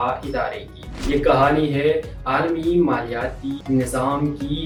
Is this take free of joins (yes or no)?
yes